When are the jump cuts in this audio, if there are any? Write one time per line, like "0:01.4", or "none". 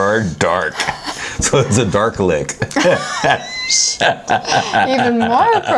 none